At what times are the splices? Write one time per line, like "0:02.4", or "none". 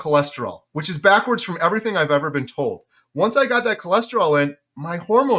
none

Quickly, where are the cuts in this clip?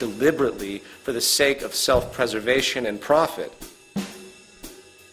0:01.8

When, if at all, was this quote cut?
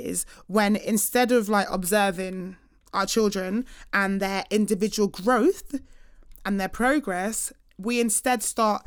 none

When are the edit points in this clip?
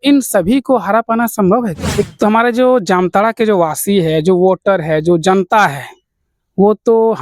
0:02.1

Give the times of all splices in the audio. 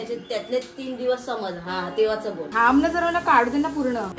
0:02.5

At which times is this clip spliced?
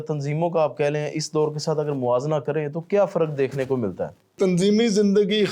0:04.3

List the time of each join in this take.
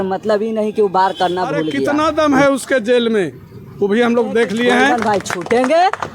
0:01.8
0:04.9

